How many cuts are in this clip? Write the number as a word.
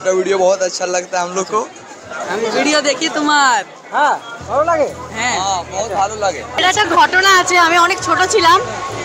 two